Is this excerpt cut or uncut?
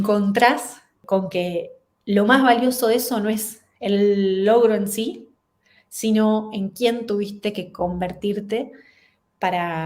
cut